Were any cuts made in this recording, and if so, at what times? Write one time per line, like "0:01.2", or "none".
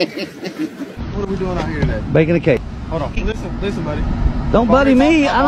0:01.0
0:03.2

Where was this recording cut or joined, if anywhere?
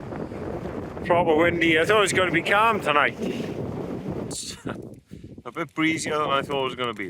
0:04.3

